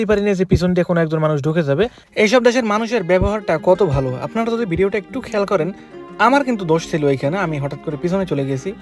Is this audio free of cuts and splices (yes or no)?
yes